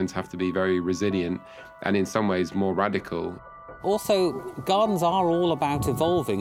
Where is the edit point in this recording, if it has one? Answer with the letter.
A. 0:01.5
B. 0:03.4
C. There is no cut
B